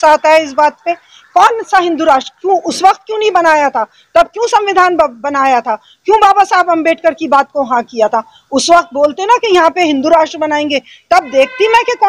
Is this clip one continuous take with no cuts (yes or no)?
yes